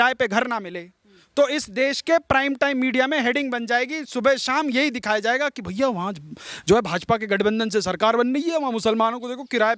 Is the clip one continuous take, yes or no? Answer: yes